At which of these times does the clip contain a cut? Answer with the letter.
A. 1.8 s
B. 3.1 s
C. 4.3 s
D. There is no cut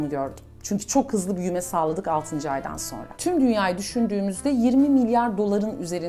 B